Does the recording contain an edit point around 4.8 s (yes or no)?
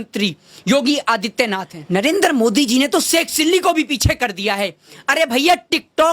no